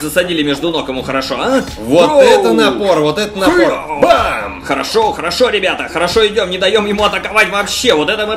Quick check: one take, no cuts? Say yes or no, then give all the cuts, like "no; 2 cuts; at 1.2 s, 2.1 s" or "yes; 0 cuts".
yes; 0 cuts